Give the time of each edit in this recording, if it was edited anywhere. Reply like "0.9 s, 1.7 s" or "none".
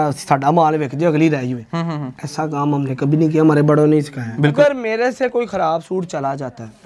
4.5 s